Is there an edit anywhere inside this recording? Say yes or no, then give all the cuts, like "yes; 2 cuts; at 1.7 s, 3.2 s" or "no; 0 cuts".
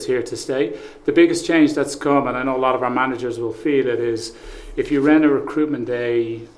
no; 0 cuts